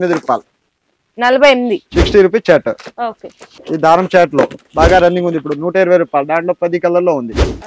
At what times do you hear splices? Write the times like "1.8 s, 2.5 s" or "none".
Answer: 1.8 s